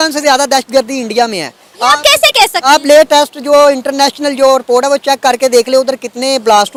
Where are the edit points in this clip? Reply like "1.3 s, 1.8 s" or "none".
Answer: none